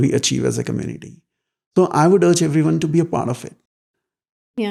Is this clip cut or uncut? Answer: uncut